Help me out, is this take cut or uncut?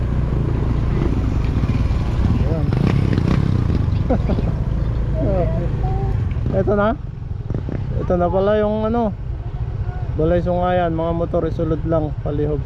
uncut